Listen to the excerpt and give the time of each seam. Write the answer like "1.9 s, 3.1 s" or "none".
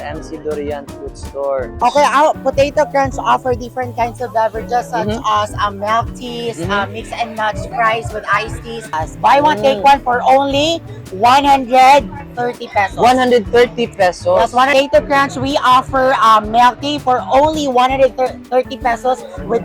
1.8 s, 8.9 s, 14.7 s